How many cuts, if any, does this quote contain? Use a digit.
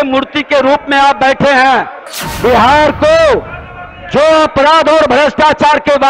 1